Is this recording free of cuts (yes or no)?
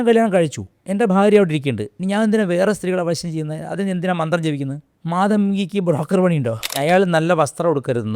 no